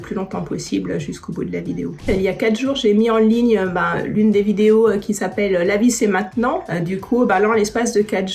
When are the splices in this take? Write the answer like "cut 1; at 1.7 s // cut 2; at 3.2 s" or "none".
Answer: cut 1; at 2.0 s // cut 2; at 6.7 s